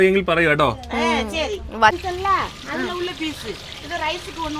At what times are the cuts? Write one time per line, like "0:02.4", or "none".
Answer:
0:01.9